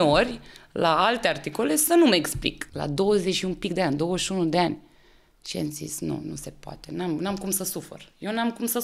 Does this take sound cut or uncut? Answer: cut